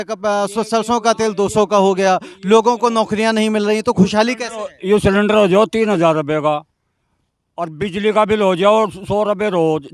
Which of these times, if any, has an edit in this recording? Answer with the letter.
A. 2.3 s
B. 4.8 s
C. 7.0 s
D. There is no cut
D